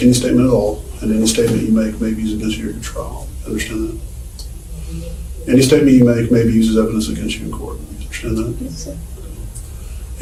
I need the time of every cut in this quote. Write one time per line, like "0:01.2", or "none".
none